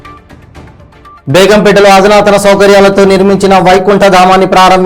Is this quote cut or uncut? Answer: uncut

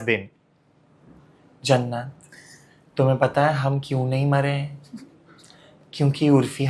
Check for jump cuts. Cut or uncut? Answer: uncut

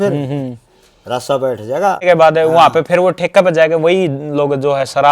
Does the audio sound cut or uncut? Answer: cut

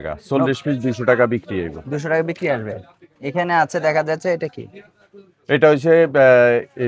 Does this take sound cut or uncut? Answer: uncut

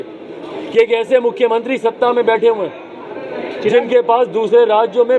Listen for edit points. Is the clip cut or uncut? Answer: uncut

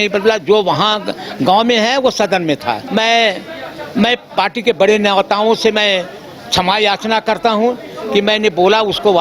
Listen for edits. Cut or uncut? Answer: cut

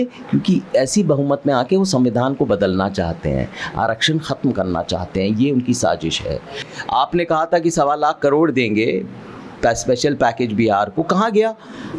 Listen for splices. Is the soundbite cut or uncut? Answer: cut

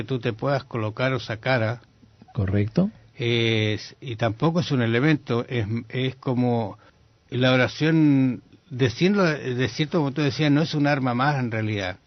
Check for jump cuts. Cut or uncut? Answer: cut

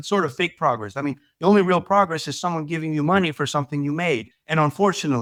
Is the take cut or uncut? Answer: uncut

